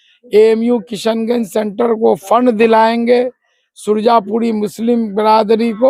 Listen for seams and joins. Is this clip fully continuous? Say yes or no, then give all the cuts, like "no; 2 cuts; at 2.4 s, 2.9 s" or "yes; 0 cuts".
yes; 0 cuts